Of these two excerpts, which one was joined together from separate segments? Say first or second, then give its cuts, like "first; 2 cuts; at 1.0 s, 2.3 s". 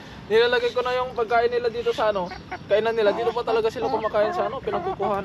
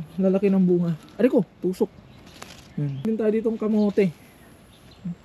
second; 1 cut; at 3.0 s